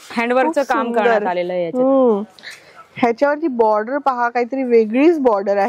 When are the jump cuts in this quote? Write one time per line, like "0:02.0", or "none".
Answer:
none